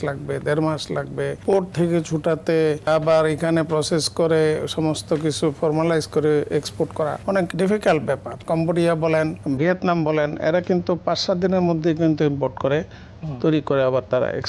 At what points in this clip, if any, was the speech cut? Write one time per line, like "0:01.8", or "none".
0:01.4
0:02.9
0:07.4
0:08.4
0:09.4